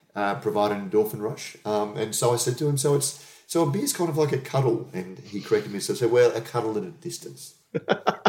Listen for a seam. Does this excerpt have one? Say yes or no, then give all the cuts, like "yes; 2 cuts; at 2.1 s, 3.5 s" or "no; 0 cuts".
no; 0 cuts